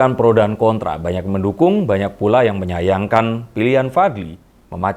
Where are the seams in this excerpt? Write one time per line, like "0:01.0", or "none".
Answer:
none